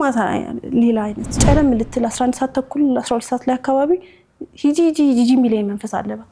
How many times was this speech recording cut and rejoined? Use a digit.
1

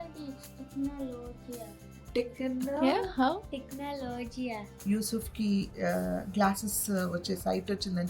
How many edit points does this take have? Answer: 1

